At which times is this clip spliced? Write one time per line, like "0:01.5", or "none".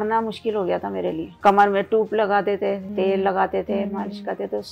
0:01.3
0:02.9